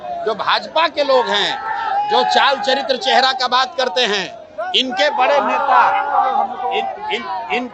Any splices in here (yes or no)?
no